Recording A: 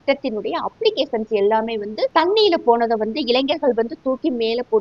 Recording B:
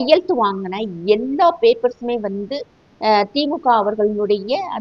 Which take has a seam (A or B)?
A